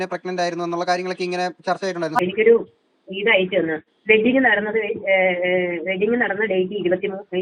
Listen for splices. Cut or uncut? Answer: cut